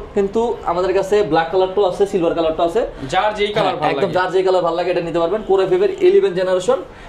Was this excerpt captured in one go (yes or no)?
yes